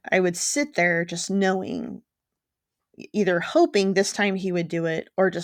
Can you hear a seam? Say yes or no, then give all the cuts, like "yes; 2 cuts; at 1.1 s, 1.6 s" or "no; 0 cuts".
no; 0 cuts